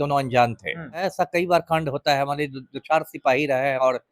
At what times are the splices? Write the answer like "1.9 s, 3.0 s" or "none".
1.0 s

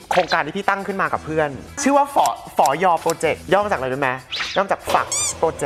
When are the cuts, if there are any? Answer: none

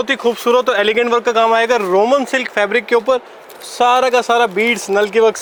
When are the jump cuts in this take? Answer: none

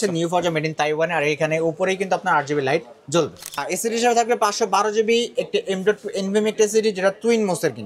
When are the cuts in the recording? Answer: 3.6 s

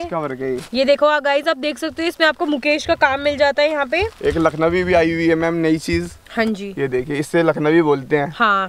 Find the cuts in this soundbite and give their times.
none

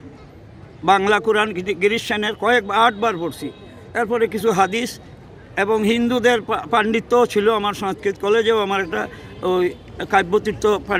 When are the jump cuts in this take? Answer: none

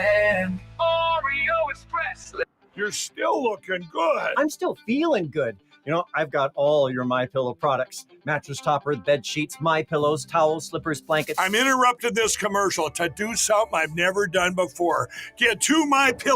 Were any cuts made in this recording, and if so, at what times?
2.2 s

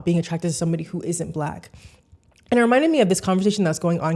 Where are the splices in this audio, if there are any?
none

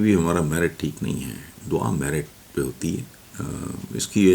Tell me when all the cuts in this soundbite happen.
3.2 s

